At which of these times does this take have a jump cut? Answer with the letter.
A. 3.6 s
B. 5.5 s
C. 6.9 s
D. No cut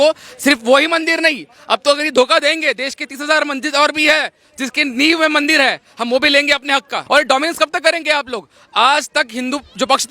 C